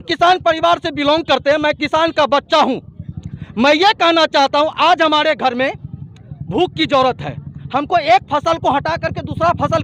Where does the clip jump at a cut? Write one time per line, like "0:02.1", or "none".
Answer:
none